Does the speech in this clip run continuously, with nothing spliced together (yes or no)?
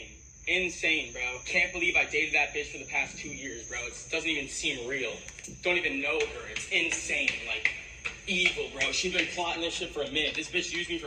no